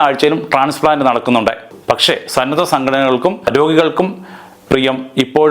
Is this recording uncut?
no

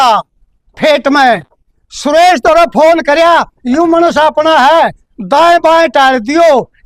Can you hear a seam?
no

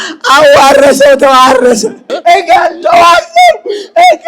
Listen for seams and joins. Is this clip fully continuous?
no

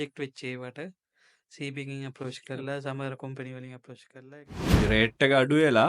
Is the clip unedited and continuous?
no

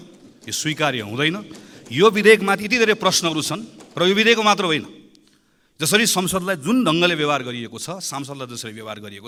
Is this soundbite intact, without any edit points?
yes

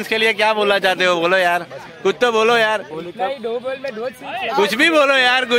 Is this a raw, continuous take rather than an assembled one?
yes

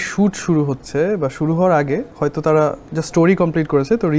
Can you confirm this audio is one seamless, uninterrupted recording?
yes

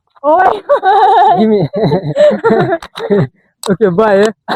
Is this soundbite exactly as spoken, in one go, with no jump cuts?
yes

